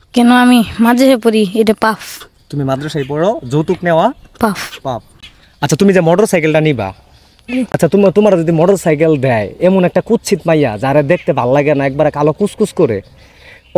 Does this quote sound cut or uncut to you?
uncut